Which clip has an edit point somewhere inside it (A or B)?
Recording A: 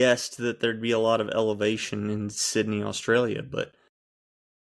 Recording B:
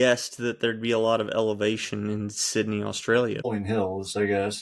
B